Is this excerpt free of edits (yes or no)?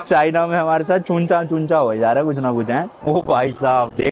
no